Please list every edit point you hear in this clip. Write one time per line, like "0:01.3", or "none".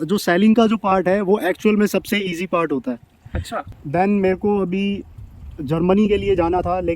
0:03.6